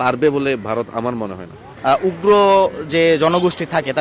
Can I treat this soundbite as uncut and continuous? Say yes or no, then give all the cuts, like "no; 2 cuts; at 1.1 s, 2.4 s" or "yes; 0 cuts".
no; 1 cut; at 1.7 s